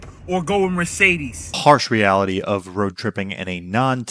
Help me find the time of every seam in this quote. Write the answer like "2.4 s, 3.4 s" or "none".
1.5 s